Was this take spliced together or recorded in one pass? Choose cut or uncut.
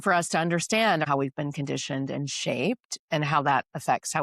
cut